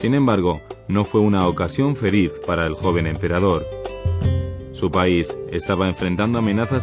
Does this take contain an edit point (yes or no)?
yes